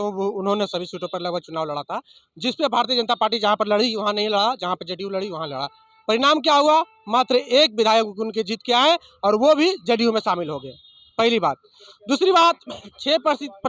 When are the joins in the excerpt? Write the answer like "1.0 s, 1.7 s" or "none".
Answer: none